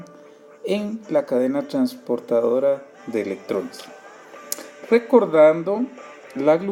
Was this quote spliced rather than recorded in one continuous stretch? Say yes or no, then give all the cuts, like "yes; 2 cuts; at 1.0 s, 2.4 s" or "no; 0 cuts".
yes; 1 cut; at 1.3 s